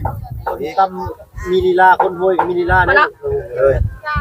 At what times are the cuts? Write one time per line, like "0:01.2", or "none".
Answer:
none